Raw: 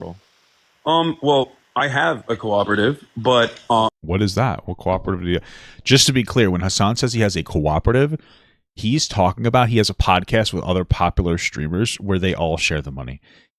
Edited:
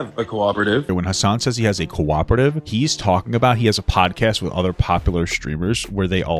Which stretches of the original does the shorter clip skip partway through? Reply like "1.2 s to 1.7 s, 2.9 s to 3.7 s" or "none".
3.0 s to 6.5 s, 8.2 s to 8.7 s